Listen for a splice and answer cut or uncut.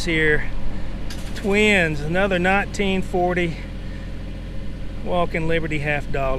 uncut